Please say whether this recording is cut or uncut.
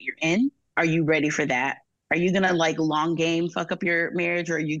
cut